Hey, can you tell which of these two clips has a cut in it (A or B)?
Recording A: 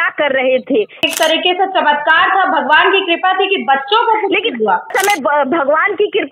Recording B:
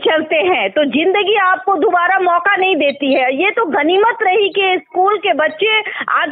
A